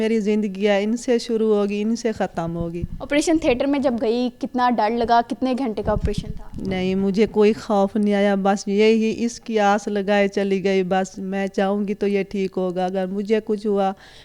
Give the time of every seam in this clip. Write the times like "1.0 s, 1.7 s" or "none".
none